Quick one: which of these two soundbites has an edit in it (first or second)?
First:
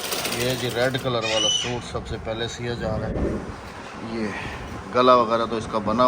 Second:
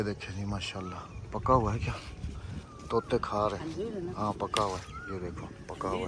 first